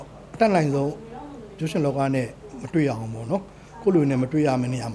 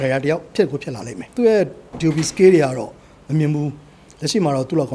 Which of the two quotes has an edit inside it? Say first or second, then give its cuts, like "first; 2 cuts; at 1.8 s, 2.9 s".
second; 1 cut; at 1.2 s